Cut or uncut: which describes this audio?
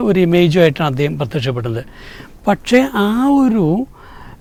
uncut